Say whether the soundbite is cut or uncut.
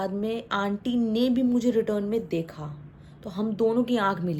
uncut